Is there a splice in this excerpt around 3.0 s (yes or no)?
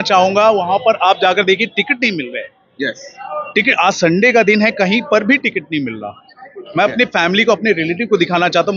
no